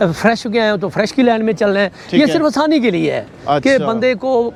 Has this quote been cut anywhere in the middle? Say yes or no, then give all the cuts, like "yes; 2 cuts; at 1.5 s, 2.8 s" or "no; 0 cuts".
no; 0 cuts